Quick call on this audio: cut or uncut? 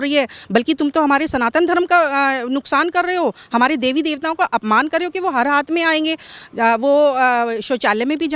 uncut